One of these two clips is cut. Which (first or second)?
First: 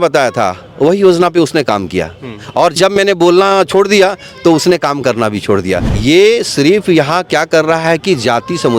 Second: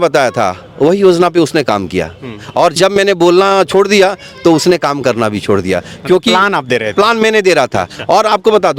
first